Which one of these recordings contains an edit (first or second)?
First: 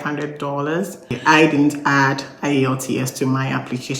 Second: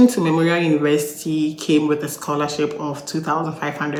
first